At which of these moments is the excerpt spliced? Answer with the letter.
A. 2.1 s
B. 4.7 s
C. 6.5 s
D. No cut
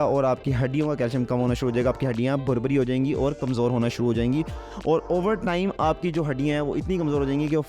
D